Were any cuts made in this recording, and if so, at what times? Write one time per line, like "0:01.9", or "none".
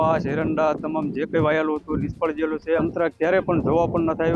0:02.8

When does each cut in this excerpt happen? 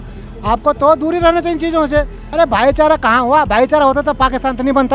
0:02.2

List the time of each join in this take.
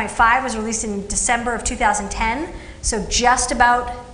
0:03.0

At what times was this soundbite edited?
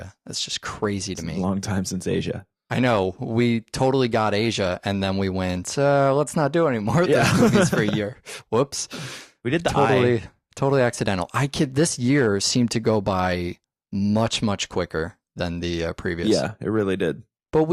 0:14.8

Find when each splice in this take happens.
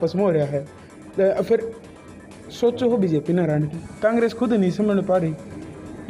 none

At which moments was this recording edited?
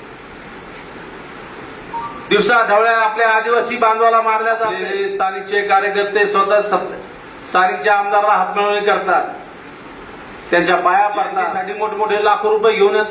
0:04.9
0:11.7

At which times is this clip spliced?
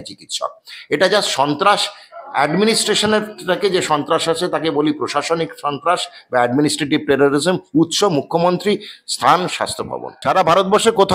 0:10.1

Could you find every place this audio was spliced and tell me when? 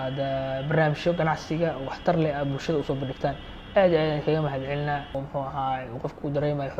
0:05.1

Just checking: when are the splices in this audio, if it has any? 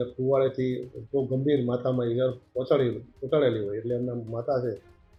none

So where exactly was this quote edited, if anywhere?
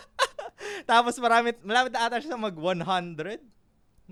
none

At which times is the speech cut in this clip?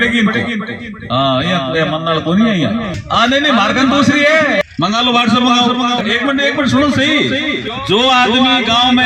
0:03.0
0:04.6
0:06.0
0:07.7

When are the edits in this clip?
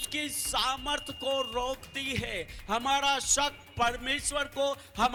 none

